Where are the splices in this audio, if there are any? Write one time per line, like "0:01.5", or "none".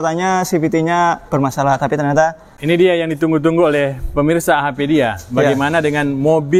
0:02.5